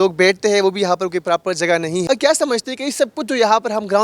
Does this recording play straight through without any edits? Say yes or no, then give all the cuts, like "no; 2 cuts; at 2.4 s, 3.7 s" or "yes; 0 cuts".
no; 1 cut; at 2.0 s